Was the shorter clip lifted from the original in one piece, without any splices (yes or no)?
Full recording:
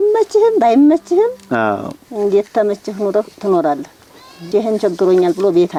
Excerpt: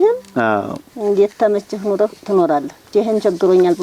no